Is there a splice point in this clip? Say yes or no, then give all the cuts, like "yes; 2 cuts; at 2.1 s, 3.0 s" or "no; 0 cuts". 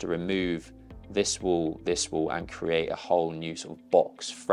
no; 0 cuts